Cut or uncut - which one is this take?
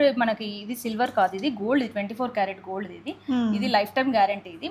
uncut